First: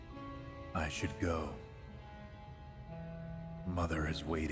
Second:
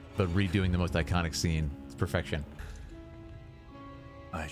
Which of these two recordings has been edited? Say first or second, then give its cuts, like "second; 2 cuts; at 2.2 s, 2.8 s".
second; 1 cut; at 2.6 s